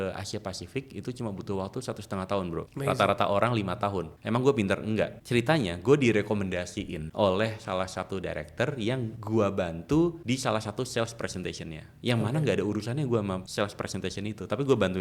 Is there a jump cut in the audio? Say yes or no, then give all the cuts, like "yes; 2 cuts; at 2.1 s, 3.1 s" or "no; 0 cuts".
yes; 7 cuts; at 2.7 s, 4.1 s, 5.2 s, 7.0 s, 9.1 s, 10.2 s, 13.5 s